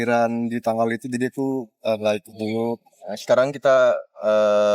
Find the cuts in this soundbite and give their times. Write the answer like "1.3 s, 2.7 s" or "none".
2.9 s